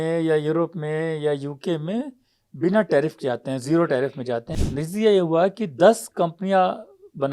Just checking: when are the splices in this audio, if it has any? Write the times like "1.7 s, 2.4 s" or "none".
4.5 s